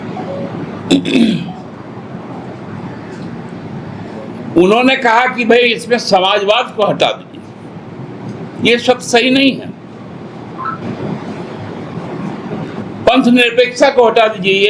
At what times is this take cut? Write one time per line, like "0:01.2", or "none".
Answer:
none